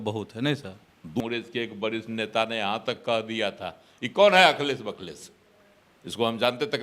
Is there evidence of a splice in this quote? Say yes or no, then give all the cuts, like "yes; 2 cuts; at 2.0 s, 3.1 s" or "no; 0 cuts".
yes; 1 cut; at 1.2 s